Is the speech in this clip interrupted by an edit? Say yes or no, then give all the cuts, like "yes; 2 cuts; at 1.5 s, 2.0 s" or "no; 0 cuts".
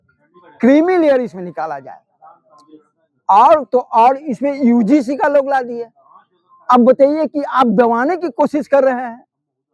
no; 0 cuts